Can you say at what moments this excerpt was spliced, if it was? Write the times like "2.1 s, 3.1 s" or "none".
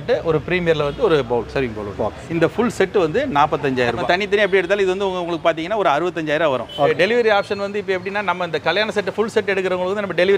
4.0 s, 6.9 s